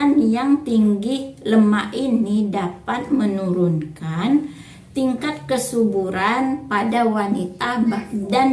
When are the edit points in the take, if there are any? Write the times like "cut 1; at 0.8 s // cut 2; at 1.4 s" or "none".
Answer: none